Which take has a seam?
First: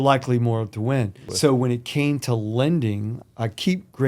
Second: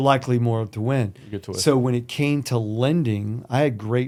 first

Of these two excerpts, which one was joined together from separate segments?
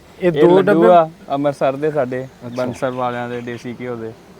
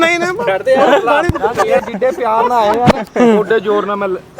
second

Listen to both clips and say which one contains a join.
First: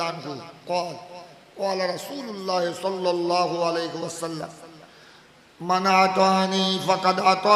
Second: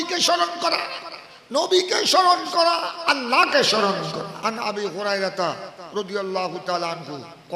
second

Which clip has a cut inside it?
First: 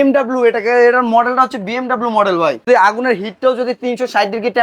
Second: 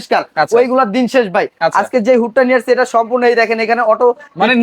first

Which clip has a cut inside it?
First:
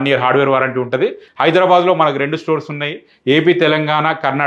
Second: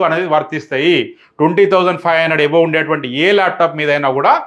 first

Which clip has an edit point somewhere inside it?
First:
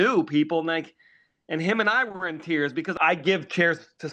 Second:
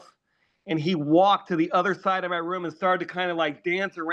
first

